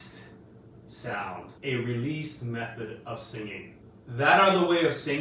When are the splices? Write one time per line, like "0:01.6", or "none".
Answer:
none